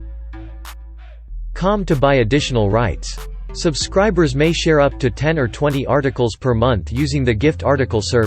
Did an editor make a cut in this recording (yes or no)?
yes